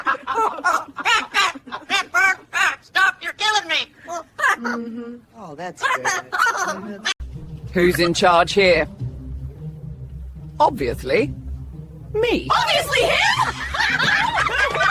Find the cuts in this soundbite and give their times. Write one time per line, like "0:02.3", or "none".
none